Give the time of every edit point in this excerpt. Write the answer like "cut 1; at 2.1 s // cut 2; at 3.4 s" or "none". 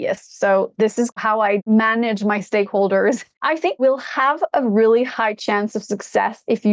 cut 1; at 1.2 s // cut 2; at 3.8 s

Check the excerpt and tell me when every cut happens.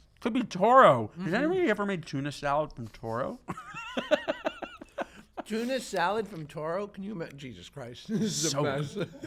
none

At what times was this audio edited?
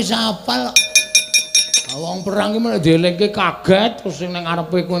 none

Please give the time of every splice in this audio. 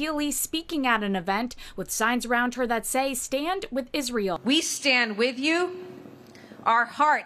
cut 1; at 4.4 s

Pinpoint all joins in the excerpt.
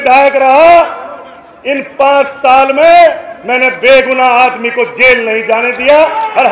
none

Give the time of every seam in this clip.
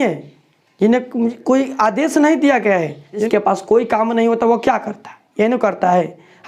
cut 1; at 3.3 s

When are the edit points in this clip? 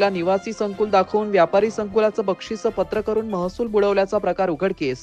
none

